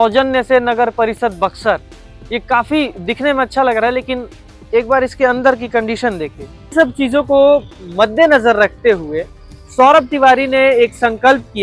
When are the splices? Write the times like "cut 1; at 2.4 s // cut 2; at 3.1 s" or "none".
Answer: cut 1; at 6.7 s